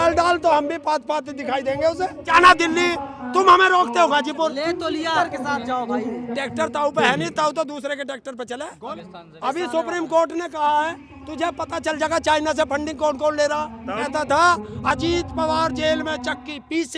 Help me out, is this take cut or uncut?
cut